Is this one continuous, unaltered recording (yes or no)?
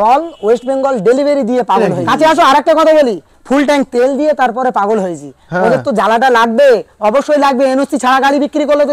no